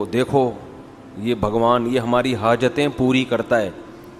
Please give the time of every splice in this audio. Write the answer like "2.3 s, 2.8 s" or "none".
none